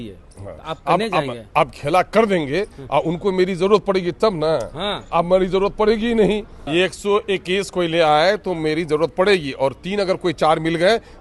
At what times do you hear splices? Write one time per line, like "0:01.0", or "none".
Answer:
0:06.6